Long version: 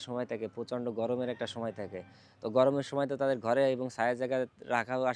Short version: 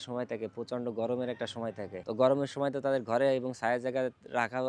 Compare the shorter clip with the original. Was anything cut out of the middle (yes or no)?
yes